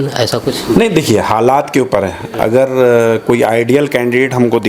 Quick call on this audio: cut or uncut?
uncut